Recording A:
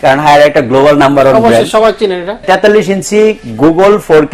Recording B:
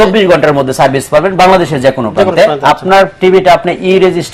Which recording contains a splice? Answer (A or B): A